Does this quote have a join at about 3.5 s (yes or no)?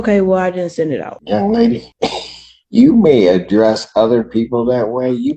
no